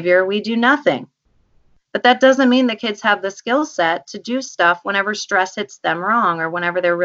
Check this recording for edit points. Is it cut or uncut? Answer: uncut